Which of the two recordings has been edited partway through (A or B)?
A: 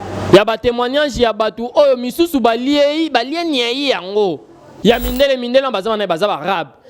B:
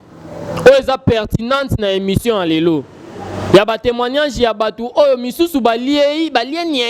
A